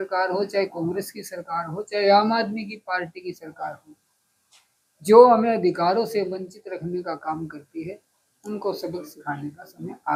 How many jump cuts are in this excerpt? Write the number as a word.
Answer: zero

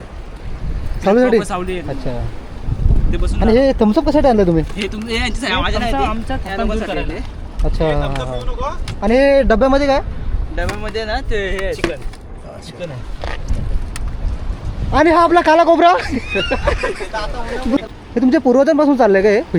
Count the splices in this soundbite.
one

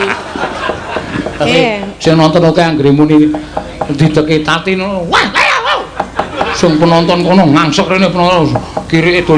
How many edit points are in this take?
one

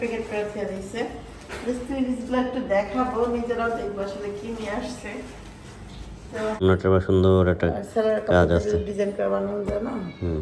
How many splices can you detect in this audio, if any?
one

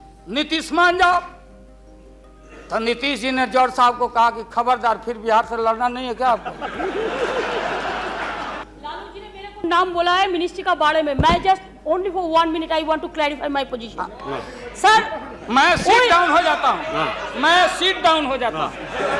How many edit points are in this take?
one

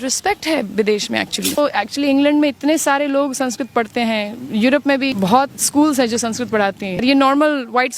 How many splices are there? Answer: three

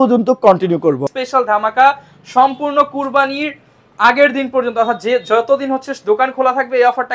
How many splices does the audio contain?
one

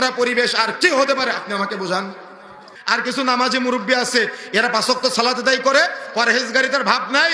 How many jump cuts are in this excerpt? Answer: one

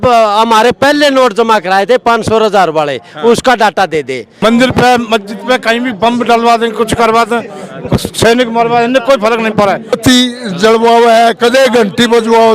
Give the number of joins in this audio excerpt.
two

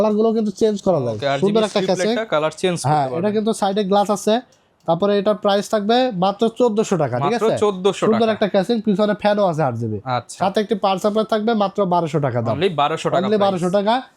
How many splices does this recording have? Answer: zero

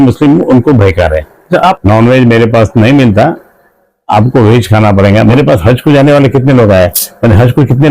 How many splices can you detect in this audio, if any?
two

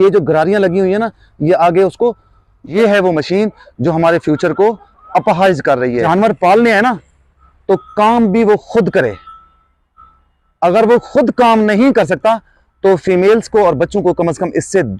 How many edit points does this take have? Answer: two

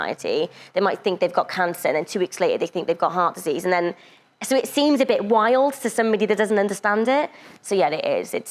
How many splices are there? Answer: zero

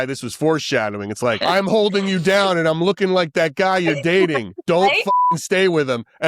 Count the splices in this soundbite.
one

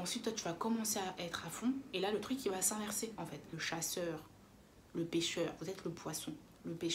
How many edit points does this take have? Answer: one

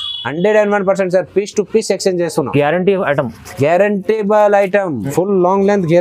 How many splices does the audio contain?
one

